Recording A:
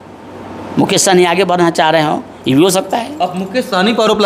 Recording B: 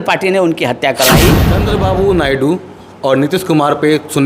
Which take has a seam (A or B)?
B